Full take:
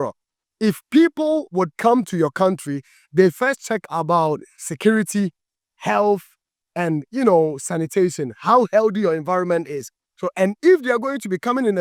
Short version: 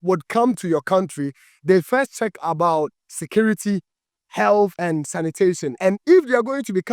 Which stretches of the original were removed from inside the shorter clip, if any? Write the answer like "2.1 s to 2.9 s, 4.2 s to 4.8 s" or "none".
6.7 s to 9.8 s